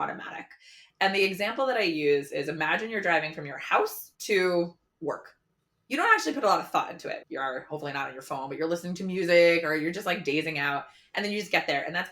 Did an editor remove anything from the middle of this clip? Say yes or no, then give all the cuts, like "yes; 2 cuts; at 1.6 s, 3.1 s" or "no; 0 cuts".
yes; 2 cuts; at 4.9 s, 7.2 s